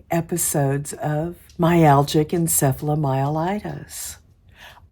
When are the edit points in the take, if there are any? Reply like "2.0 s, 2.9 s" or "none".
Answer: 1.4 s